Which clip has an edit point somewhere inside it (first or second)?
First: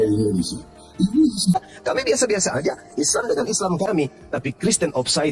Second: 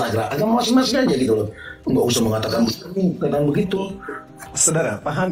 first